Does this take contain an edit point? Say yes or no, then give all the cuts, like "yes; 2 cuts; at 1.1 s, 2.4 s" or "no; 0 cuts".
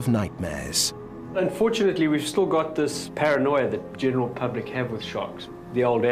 no; 0 cuts